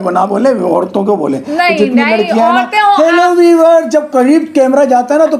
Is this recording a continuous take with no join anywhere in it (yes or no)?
yes